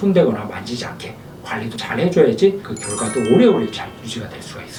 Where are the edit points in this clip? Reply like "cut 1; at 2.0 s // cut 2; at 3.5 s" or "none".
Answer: none